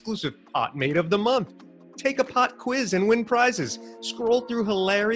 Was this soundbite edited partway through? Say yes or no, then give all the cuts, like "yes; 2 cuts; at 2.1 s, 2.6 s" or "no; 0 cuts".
no; 0 cuts